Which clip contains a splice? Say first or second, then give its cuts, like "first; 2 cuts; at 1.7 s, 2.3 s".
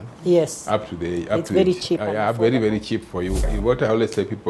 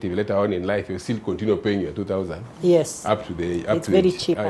first; 1 cut; at 3.5 s